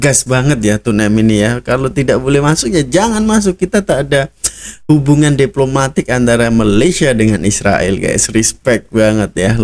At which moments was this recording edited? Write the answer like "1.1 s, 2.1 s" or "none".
none